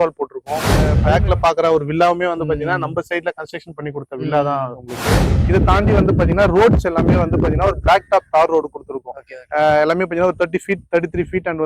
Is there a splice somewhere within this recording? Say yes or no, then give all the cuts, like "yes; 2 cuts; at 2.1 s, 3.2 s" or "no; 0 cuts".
yes; 2 cuts; at 1.0 s, 5.3 s